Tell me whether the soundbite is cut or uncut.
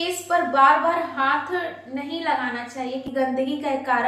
cut